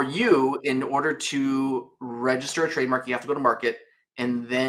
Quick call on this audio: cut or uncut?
uncut